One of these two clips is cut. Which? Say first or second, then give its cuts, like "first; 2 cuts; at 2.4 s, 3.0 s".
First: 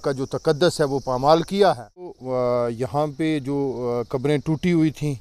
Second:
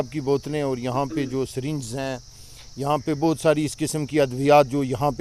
first; 1 cut; at 2.2 s